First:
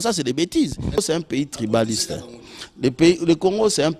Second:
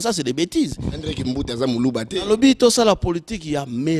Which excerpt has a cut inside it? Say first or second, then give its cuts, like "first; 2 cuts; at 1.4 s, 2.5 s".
first; 1 cut; at 1.0 s